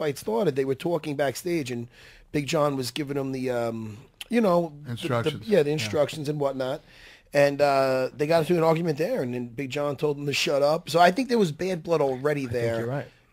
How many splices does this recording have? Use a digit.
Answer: 0